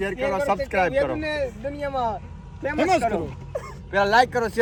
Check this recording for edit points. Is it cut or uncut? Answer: uncut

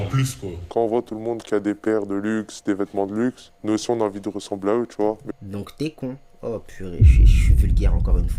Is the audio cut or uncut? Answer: uncut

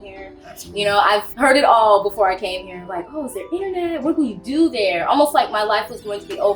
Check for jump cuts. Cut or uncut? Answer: cut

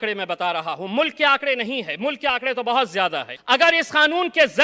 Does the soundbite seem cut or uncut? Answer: cut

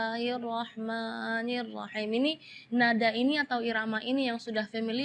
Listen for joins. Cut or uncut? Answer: uncut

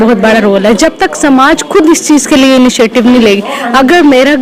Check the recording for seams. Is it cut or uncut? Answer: uncut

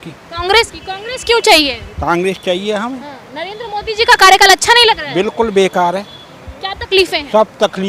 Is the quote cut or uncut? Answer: uncut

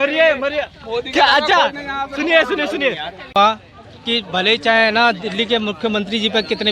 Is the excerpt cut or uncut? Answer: cut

